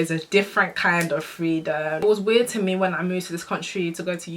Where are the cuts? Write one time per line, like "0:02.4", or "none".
0:02.0